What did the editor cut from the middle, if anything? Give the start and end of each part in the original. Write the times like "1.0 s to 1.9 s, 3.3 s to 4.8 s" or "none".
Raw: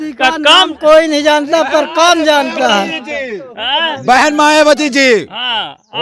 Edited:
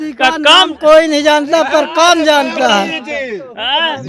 none